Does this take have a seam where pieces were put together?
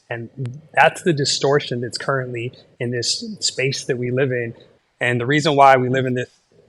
yes; 1 cut; at 4.6 s

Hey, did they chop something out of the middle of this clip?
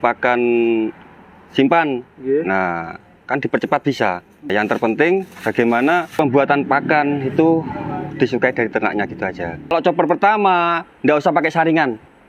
yes; 3 cuts; at 4.5 s, 6.1 s, 9.7 s

